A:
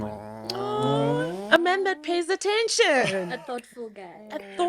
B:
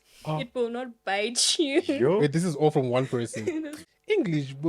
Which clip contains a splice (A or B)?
B